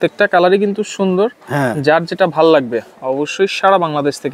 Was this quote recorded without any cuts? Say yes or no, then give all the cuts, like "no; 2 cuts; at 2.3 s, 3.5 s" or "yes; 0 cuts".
yes; 0 cuts